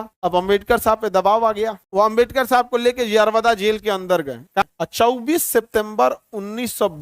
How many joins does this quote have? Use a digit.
2